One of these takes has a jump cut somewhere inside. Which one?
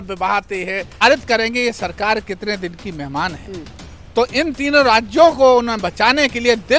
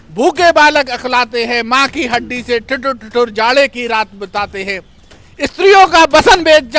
first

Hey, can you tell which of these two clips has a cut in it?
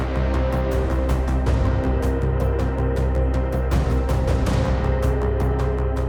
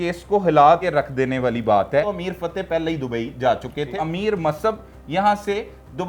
second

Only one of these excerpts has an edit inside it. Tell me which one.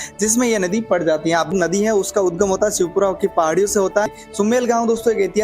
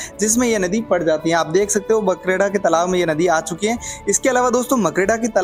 first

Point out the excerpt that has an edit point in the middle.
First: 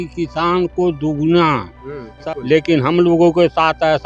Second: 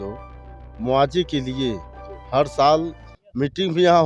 first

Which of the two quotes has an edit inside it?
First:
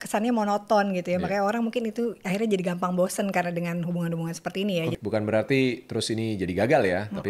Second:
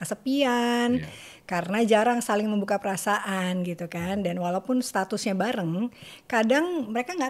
first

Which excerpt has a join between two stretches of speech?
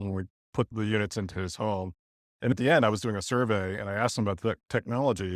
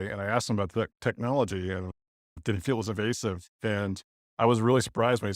first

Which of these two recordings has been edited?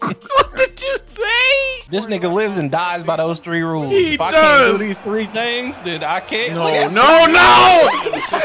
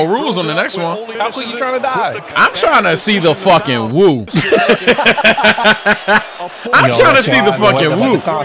first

